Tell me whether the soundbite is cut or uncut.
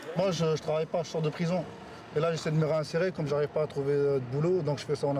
uncut